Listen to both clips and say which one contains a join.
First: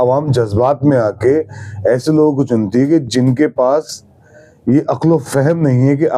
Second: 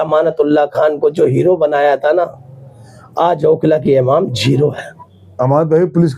second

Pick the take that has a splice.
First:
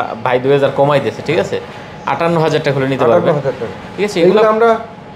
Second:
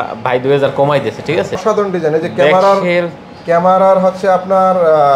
second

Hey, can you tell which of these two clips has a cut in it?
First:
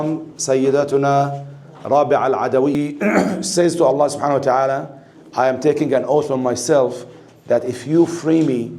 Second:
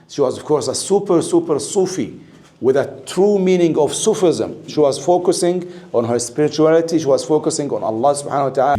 first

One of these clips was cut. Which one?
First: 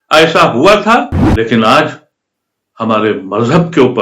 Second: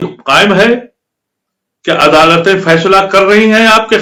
first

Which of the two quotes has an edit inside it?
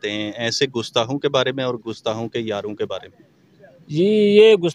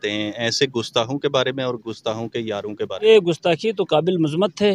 second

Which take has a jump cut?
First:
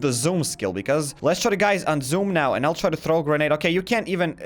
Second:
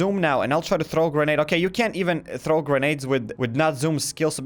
first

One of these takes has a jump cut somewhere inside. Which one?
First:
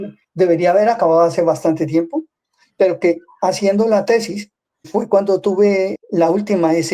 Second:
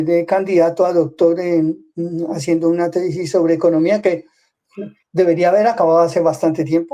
first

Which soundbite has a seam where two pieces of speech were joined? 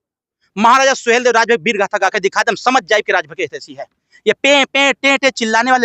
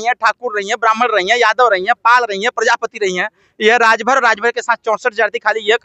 first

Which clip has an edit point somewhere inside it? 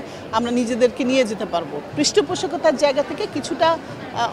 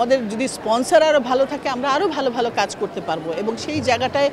first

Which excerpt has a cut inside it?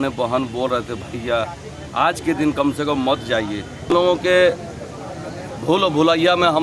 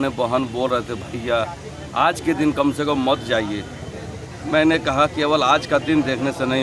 first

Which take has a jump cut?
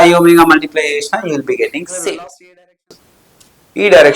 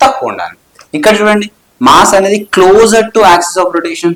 first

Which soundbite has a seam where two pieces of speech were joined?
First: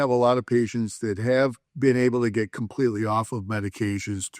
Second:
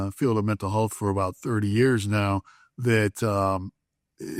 first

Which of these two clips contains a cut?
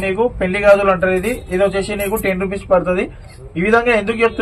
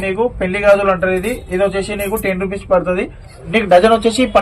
second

